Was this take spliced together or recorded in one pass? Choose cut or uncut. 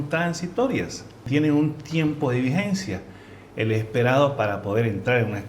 cut